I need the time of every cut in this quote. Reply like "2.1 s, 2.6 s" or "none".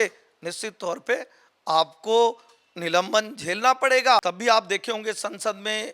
4.2 s